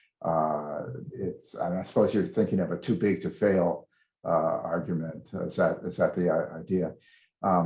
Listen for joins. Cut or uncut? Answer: uncut